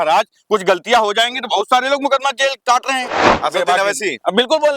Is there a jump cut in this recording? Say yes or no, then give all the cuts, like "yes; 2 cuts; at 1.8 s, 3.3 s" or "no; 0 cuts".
yes; 1 cut; at 3.3 s